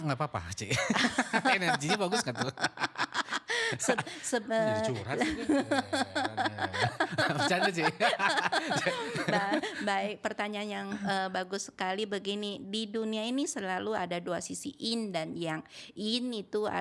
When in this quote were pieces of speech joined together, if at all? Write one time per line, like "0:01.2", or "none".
none